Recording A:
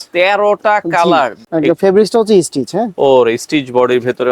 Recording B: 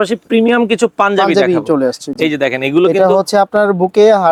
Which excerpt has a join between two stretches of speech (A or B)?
A